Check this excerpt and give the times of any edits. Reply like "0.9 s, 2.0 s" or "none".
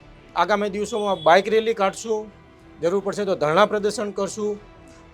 none

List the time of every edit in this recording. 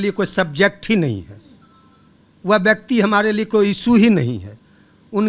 none

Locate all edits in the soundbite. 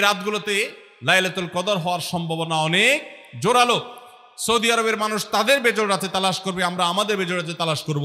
none

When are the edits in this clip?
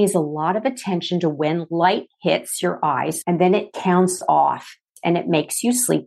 3.2 s, 4.9 s

